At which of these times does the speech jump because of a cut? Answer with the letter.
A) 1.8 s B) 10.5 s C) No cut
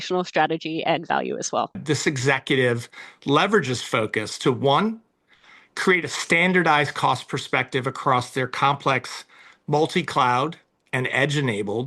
A